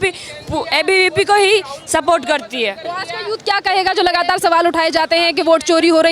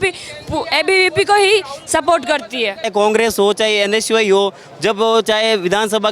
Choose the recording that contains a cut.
second; 1 cut; at 2.9 s

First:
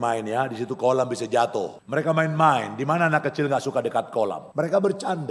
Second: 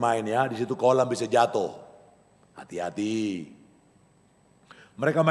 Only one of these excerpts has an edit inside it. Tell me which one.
first; 2 cuts; at 1.8 s, 4.4 s

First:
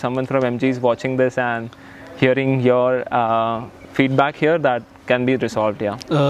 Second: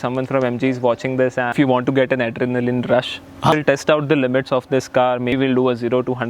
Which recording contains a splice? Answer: second; 3 cuts; at 1.5 s, 3.5 s, 5.3 s

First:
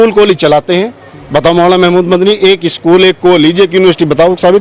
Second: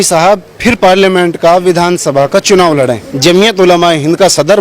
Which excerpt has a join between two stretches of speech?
second; 1 cut; at 3.1 s

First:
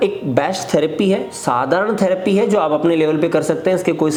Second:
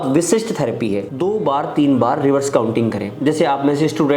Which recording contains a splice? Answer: second; 1 cut; at 1.1 s

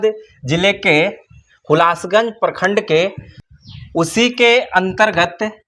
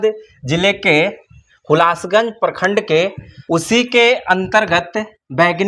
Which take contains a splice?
second; 1 cut; at 3.3 s

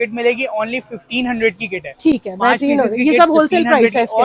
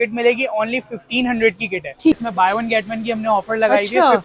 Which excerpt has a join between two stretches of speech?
second; 1 cut; at 2.2 s

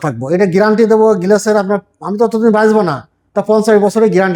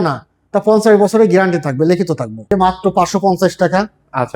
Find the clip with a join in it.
second; 1 cut; at 2.5 s

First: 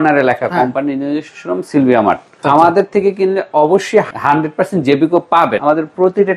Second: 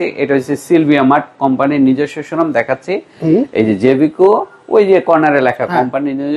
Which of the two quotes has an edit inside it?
first; 3 cuts; at 2.4 s, 4.1 s, 5.6 s

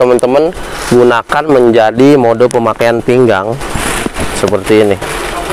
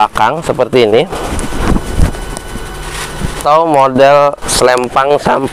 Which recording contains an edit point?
second; 2 cuts; at 1.4 s, 3.4 s

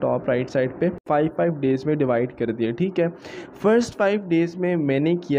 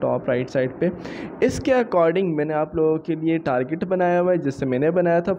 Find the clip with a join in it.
first; 1 cut; at 1.0 s

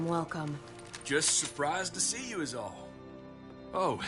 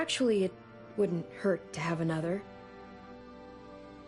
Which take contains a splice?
second; 1 cut; at 2.4 s

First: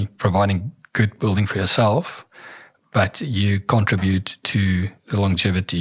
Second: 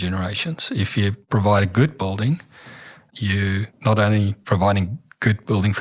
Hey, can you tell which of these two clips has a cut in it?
second; 2 cuts; at 1.2 s, 3.4 s

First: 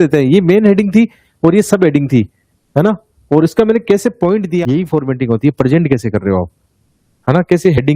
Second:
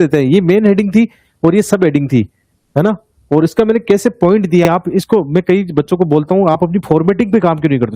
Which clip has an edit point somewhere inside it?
first; 1 cut; at 4.6 s

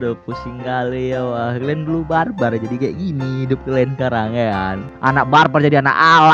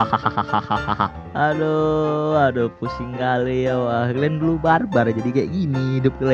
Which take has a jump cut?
first; 1 cut; at 4.9 s

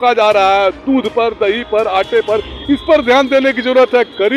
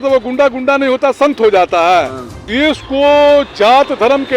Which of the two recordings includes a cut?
second; 1 cut; at 2.5 s

